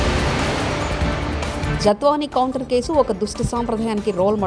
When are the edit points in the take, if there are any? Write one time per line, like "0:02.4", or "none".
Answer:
0:01.6